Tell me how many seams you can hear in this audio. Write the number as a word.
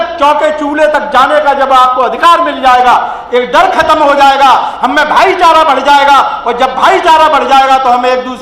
zero